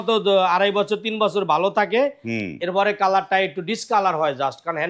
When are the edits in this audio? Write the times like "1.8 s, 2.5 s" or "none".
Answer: none